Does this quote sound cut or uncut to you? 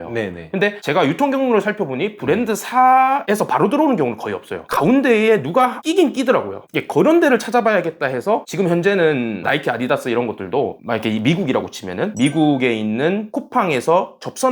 uncut